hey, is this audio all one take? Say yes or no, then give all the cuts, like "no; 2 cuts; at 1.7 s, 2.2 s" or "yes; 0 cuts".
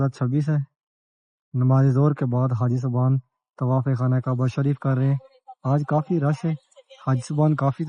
yes; 0 cuts